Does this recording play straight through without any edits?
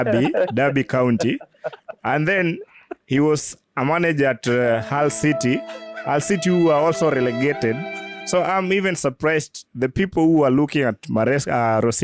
yes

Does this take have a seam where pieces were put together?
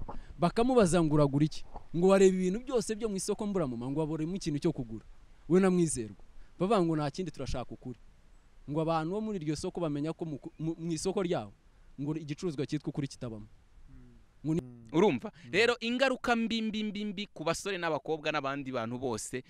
yes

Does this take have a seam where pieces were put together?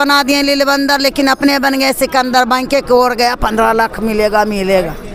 no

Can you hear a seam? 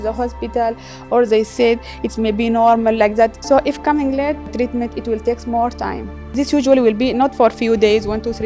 yes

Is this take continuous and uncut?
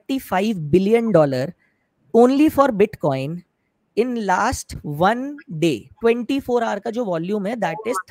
yes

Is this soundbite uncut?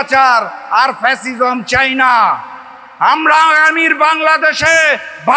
yes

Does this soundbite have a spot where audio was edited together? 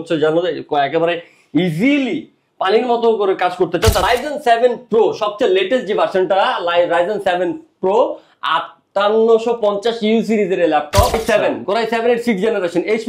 yes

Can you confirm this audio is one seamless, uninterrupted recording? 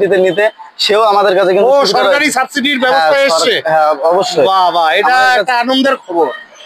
yes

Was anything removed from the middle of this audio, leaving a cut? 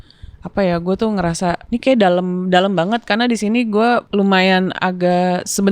yes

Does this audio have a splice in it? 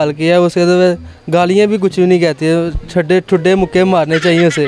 no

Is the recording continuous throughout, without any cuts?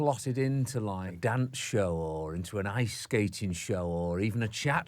no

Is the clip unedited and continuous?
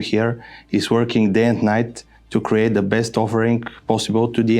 yes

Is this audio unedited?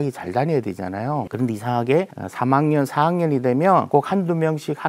no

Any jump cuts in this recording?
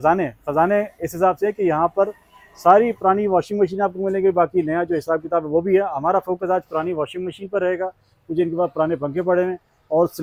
no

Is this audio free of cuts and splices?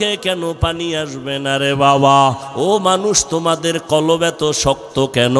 no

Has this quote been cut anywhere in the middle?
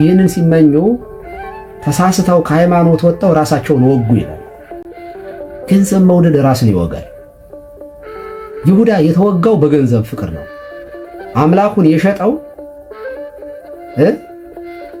no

